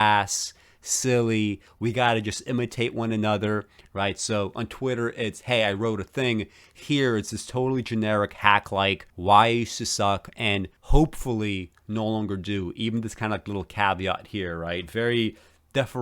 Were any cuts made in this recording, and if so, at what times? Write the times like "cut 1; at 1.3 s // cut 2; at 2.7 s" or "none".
cut 1; at 9.1 s // cut 2; at 10.8 s